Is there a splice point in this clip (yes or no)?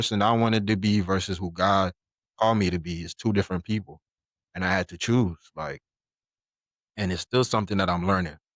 no